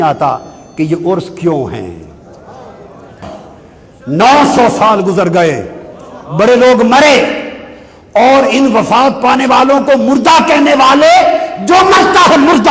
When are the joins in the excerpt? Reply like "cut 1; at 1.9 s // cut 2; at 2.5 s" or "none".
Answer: cut 1; at 3.2 s